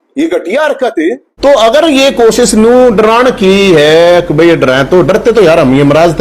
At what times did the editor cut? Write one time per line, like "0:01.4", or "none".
0:01.3